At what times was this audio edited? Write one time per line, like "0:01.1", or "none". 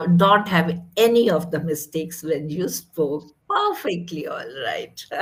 none